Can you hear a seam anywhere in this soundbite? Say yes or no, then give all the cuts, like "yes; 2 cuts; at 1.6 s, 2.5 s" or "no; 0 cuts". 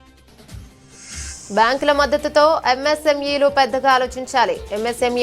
yes; 1 cut; at 1.2 s